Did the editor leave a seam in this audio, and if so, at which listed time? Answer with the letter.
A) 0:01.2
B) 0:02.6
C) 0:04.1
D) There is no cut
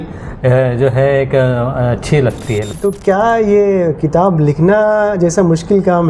B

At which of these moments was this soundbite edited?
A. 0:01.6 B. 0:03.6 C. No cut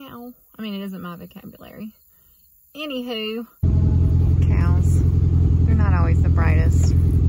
B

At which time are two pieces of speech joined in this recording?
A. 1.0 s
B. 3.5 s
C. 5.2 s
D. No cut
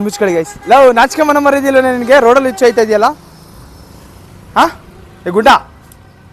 D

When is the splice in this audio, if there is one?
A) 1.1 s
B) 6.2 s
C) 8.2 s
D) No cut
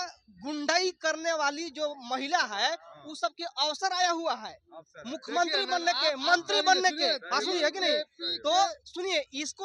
D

